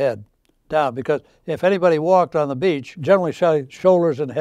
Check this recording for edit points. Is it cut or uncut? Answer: cut